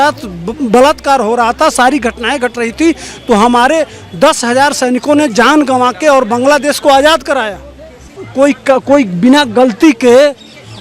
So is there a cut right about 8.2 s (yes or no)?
yes